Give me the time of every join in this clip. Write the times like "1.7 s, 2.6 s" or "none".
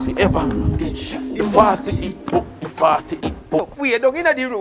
3.6 s

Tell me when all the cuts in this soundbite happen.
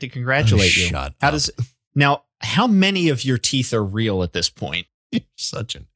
4.9 s

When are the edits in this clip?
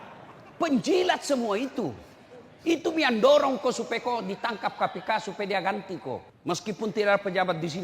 6.3 s

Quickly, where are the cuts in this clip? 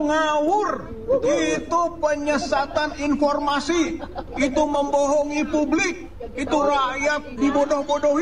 none

